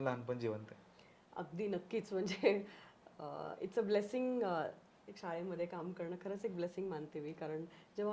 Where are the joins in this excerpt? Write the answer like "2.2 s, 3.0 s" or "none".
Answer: none

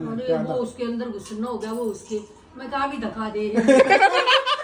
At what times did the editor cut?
none

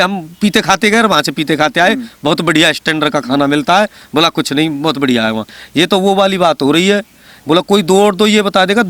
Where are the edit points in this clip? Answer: 5.5 s

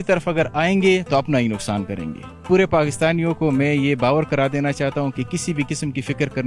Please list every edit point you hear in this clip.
2.4 s

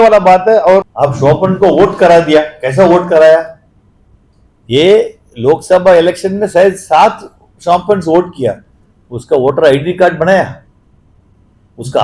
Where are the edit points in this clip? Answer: 0.9 s

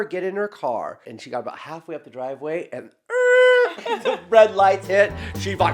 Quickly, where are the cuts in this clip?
1.1 s

